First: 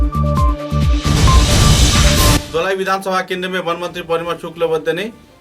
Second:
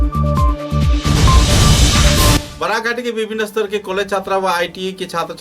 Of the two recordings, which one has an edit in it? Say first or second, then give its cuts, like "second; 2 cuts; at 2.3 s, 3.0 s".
second; 1 cut; at 2.4 s